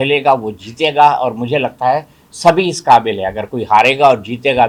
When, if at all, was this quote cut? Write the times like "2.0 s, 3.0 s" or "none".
none